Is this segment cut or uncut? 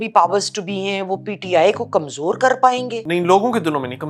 cut